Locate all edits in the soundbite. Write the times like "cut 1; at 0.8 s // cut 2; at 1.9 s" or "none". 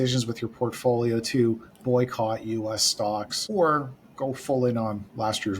cut 1; at 3.4 s